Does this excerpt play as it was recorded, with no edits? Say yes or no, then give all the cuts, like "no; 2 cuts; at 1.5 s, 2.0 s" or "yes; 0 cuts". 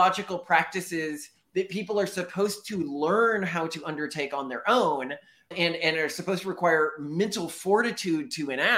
yes; 0 cuts